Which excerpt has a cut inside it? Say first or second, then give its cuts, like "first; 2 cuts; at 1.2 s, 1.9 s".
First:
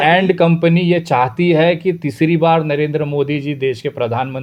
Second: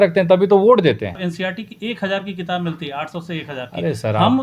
second; 1 cut; at 1.2 s